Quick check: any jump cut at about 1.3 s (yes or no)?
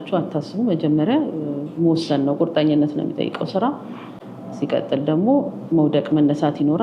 no